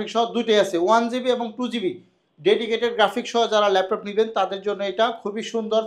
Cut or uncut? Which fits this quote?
uncut